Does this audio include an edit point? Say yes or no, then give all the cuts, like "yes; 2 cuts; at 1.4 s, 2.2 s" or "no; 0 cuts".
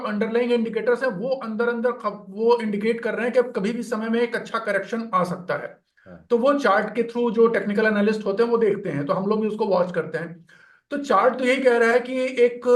no; 0 cuts